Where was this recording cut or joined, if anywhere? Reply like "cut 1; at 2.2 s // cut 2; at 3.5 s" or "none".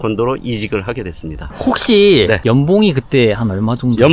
cut 1; at 1.5 s